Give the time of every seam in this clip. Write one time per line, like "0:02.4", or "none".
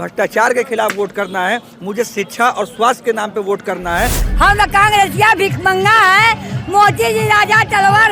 0:04.2